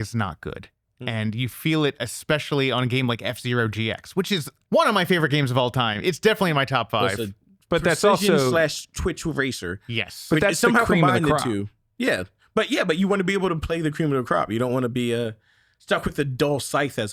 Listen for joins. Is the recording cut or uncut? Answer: cut